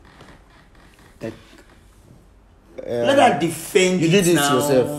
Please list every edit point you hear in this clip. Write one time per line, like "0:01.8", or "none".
none